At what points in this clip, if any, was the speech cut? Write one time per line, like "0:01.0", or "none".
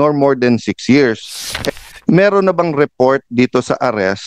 0:01.6